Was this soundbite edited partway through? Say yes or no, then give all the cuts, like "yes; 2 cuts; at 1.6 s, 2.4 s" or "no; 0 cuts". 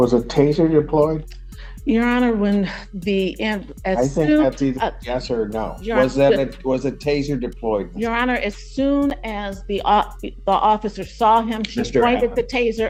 no; 0 cuts